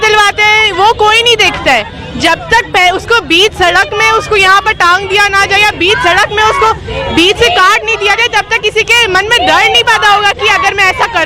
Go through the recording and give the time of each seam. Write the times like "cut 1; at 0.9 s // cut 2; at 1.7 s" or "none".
none